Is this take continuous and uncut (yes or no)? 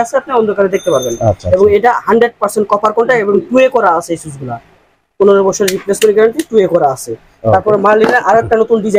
yes